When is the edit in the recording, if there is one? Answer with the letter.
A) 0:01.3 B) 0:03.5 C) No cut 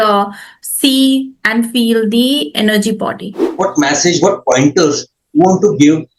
B